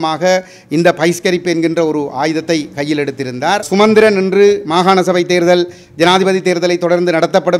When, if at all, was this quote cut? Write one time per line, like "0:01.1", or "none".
0:03.7